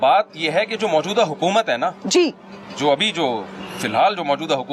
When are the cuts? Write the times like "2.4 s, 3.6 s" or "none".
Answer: none